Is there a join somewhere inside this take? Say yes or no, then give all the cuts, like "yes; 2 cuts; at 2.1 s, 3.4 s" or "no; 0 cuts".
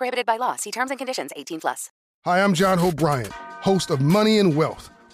yes; 1 cut; at 1.9 s